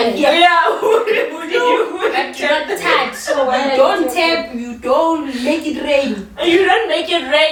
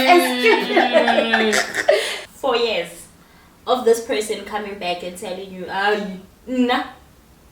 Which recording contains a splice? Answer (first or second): second